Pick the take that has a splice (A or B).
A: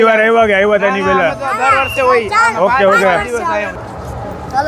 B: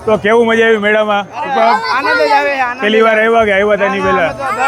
A